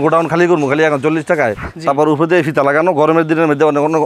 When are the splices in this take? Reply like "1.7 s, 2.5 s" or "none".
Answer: 1.6 s